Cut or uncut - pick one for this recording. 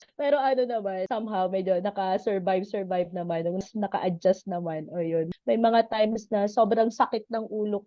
cut